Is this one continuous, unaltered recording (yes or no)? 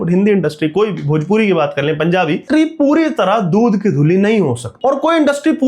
no